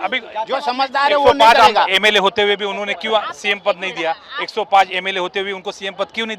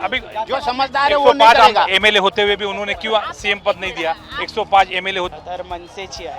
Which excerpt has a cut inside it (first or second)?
second